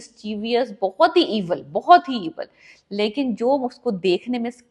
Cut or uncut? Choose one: uncut